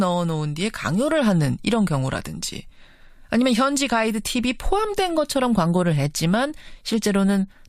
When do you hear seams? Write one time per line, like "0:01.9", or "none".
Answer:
0:03.8